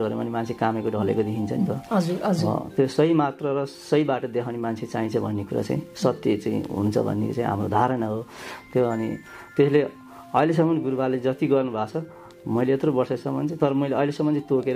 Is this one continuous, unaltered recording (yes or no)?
yes